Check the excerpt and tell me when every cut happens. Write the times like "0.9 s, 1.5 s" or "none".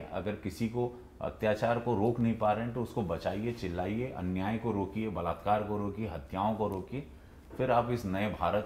none